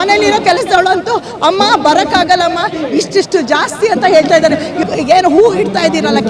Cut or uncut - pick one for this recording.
cut